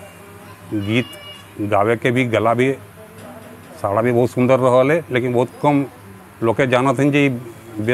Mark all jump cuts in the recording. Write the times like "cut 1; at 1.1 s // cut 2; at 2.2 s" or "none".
none